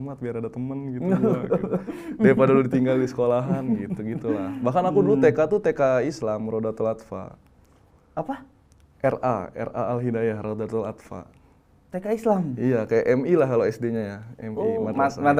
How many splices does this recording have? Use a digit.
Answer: 0